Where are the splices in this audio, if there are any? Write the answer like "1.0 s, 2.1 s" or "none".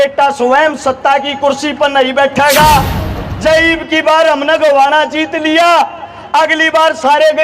3.0 s